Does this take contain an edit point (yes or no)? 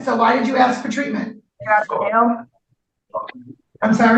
yes